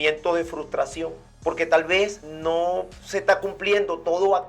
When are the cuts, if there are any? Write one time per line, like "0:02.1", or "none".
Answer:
0:01.2
0:02.3